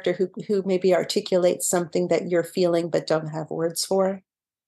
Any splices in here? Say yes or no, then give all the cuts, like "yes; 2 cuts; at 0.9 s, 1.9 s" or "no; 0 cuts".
no; 0 cuts